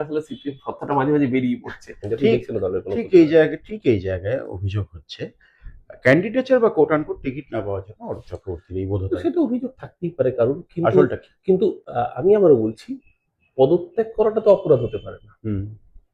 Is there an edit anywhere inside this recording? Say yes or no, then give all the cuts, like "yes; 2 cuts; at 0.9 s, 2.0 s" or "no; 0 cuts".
yes; 1 cut; at 1.9 s